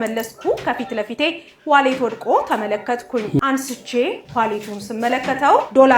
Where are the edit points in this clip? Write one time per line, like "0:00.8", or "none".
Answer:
0:03.4